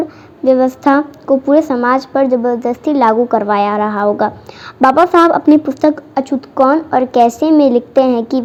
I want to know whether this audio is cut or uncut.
uncut